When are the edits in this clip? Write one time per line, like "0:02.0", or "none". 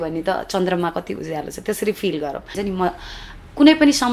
0:02.5